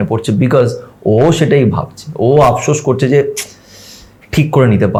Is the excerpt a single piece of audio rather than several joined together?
yes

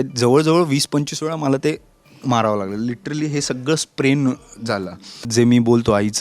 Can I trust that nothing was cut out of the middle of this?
no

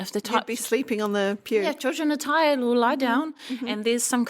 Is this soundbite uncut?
yes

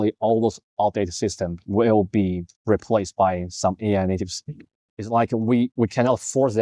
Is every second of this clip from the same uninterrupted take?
no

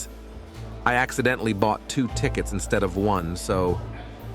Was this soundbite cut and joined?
no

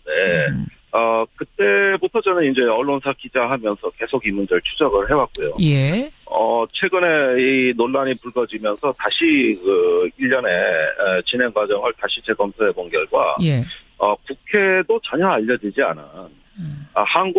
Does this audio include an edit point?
no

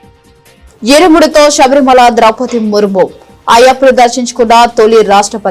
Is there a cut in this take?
no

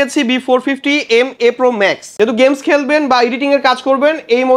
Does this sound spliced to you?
yes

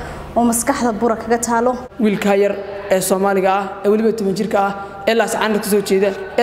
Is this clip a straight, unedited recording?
no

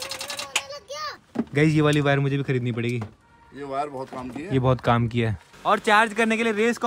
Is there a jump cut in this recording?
yes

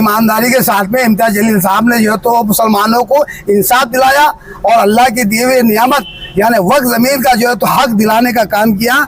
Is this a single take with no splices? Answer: yes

